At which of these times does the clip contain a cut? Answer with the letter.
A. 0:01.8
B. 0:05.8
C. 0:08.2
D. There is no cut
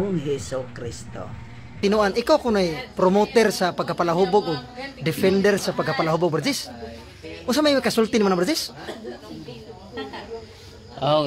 A